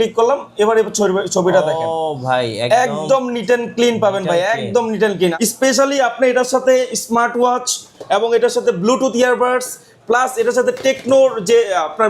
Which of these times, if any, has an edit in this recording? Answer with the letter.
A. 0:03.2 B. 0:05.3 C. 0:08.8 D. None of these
B